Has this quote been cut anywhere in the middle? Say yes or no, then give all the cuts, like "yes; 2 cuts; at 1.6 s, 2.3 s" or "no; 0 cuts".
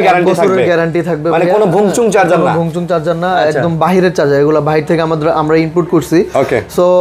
no; 0 cuts